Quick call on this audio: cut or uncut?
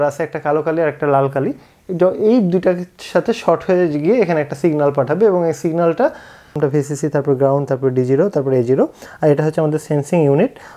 cut